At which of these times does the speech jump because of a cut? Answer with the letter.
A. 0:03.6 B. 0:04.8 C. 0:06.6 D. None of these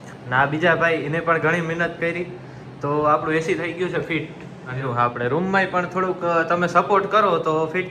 B